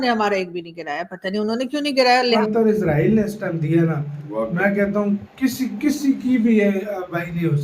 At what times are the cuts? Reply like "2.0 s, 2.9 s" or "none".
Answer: 2.4 s